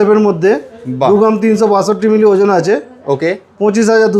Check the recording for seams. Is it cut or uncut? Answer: uncut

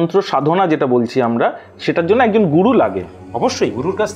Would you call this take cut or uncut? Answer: uncut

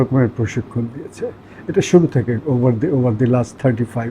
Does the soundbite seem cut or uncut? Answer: uncut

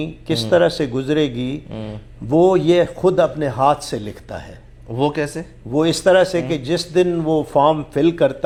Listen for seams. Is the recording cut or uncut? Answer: uncut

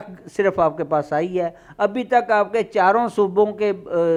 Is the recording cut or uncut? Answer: uncut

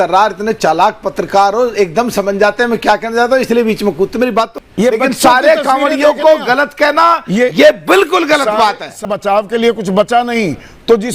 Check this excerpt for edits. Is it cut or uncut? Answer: cut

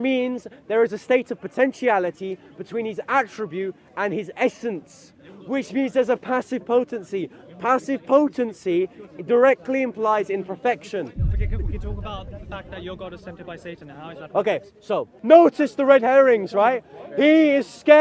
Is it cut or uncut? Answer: cut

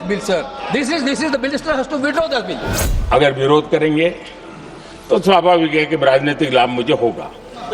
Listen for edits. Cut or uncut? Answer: cut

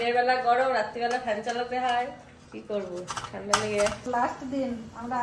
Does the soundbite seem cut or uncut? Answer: uncut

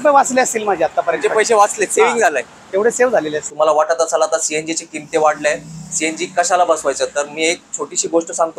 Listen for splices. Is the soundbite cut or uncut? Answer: cut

